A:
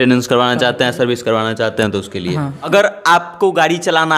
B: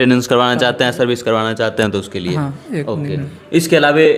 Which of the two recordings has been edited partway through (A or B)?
A